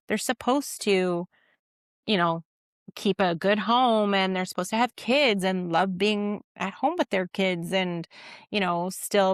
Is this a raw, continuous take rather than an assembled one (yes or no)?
yes